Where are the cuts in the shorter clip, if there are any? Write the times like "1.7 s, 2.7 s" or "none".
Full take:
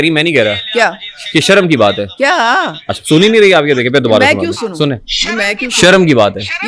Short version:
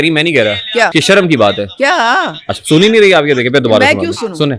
0.9 s